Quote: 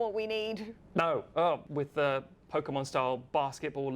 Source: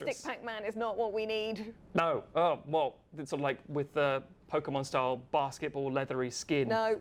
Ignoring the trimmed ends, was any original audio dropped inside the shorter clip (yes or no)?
yes